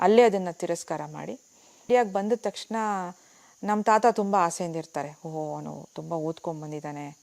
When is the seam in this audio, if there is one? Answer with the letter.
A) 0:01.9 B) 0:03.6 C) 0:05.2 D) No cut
A